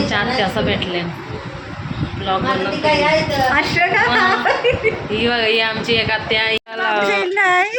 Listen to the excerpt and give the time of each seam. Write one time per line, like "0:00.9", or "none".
0:06.6